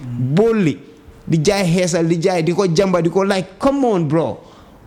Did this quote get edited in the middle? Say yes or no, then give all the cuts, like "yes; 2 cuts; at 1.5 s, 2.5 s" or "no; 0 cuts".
no; 0 cuts